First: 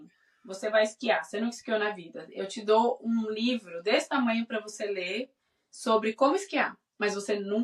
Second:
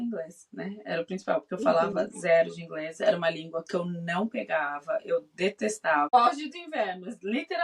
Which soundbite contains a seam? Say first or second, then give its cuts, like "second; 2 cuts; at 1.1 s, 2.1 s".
second; 1 cut; at 6.1 s